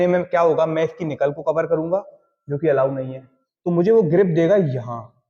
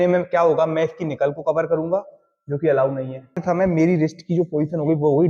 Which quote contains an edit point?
second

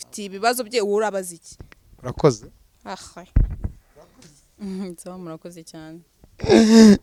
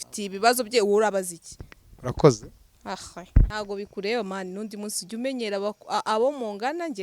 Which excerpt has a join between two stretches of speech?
second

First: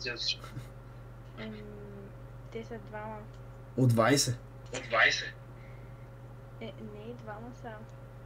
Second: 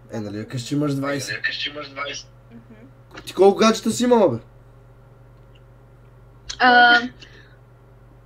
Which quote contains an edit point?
second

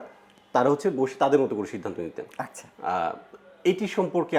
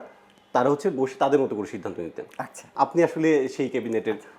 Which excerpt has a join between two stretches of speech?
second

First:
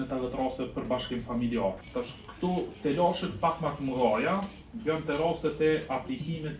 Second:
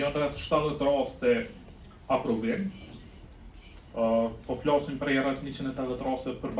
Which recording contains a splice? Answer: first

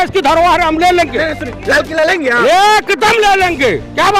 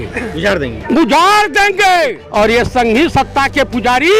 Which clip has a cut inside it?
second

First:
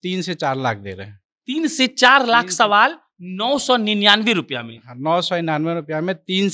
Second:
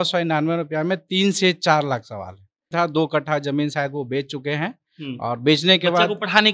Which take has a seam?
second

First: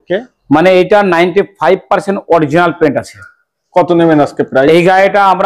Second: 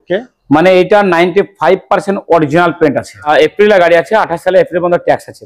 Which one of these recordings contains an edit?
second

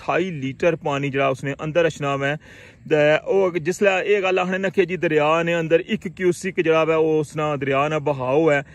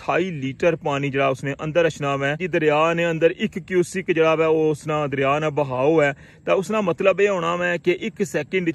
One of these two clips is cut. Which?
second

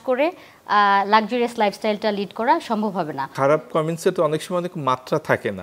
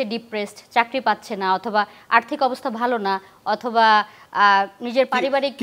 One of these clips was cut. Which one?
first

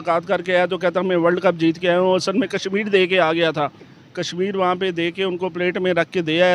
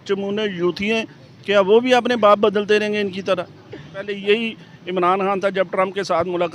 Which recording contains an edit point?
second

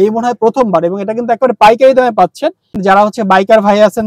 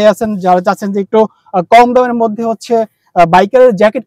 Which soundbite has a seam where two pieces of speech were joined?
first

